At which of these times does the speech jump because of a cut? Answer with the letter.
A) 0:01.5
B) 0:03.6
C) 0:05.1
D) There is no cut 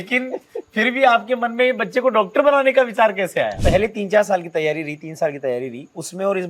B